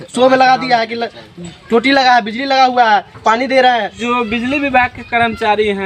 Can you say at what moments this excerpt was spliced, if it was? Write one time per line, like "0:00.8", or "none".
0:04.0